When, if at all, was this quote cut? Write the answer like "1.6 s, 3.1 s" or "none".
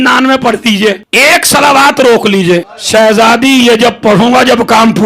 1.1 s, 2.8 s